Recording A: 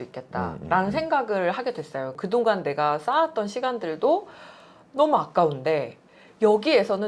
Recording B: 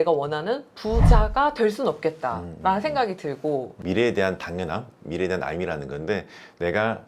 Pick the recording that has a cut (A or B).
B